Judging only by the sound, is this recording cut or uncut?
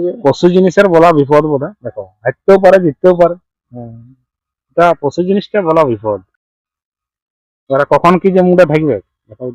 uncut